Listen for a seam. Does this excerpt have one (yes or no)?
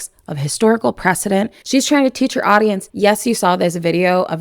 yes